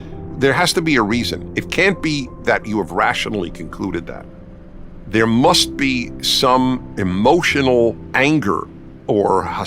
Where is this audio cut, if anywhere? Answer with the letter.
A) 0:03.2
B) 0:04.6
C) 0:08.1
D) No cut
B